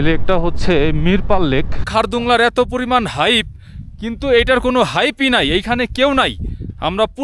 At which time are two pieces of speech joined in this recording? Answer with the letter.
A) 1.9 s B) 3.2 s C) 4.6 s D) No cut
A